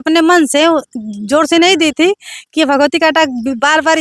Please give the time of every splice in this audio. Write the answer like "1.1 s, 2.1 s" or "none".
none